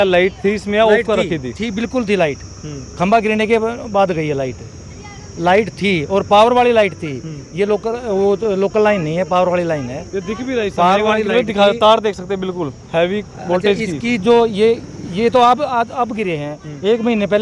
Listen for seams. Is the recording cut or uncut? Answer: uncut